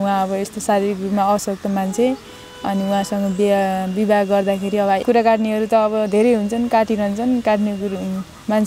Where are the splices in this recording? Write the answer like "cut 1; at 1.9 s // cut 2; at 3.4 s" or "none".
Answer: cut 1; at 5.0 s